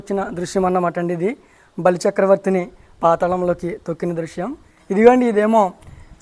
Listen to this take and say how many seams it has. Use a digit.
1